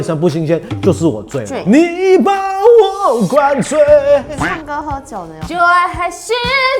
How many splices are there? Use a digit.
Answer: 1